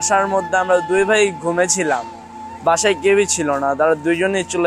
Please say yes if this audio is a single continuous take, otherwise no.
yes